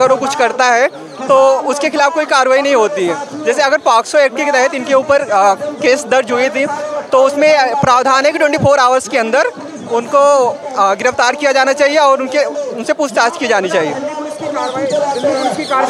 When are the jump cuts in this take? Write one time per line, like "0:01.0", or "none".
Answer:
none